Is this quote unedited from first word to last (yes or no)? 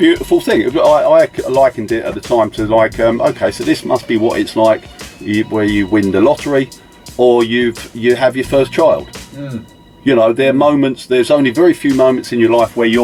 yes